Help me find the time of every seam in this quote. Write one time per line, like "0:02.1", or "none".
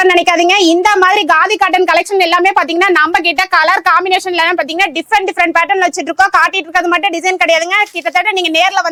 none

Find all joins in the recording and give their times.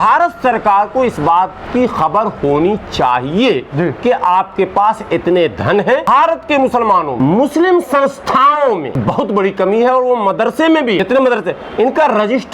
0:06.1
0:07.1
0:09.0
0:11.0

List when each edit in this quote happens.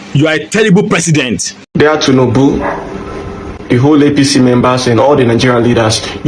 0:01.6

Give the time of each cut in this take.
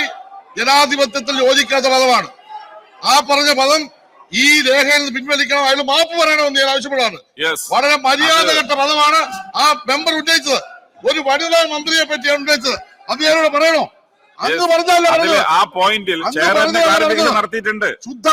none

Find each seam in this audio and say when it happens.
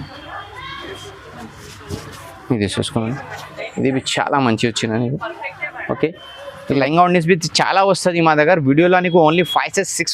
0:06.8

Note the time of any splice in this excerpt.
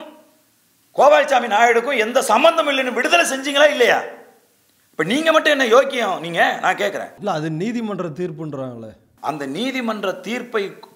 0:07.2
0:09.1

